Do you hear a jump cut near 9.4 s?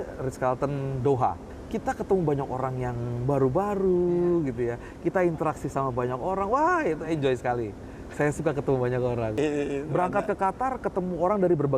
yes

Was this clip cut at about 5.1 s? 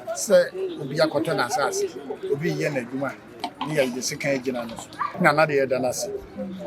yes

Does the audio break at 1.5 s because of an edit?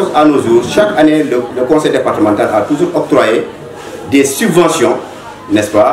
yes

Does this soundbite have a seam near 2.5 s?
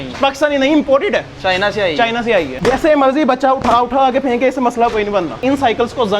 yes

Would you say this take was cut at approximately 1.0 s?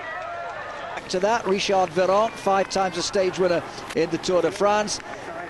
no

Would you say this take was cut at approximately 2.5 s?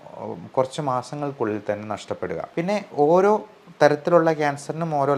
yes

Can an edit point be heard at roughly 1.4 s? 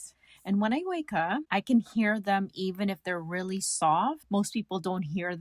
yes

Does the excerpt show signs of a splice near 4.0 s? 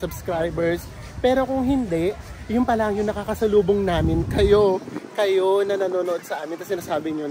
no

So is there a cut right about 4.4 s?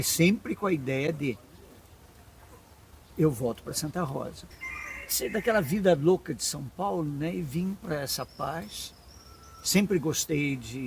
yes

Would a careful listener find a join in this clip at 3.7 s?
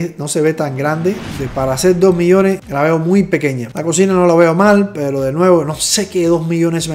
yes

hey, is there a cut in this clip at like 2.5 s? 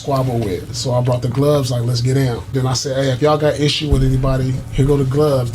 yes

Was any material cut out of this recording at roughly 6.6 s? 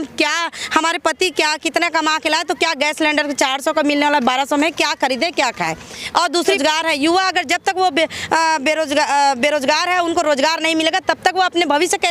yes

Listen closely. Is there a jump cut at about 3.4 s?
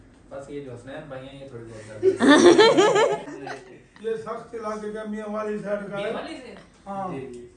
yes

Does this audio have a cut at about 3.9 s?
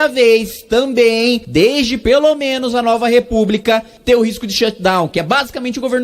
yes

